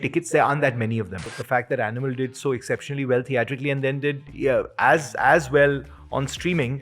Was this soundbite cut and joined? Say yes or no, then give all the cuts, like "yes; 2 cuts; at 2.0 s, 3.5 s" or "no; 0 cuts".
yes; 1 cut; at 1.4 s